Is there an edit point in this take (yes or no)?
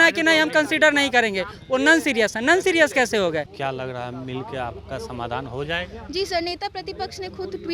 yes